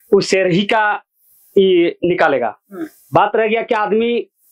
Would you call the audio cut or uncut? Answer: uncut